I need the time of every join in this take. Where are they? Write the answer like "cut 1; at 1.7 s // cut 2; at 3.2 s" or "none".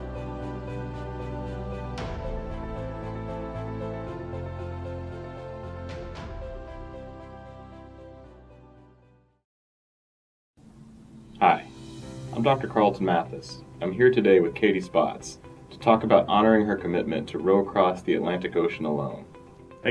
none